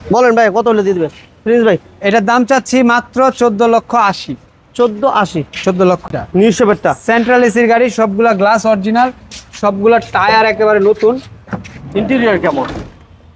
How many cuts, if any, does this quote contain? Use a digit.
1